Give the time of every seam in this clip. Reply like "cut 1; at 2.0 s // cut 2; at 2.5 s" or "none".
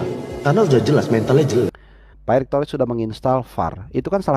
cut 1; at 1.8 s